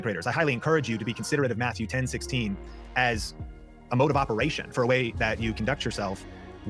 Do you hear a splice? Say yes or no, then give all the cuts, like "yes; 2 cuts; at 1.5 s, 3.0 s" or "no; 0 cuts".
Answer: no; 0 cuts